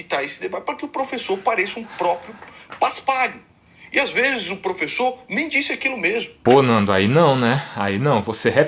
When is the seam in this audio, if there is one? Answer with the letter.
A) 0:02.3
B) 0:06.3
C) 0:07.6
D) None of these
B